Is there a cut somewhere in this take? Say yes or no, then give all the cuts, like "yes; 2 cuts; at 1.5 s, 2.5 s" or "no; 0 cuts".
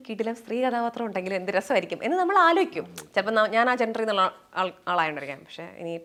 no; 0 cuts